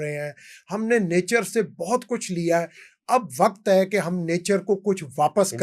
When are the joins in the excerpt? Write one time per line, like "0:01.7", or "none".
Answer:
none